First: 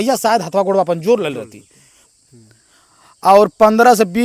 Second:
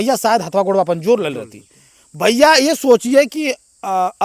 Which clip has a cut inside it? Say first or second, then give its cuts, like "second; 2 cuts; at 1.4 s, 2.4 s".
first; 1 cut; at 2.1 s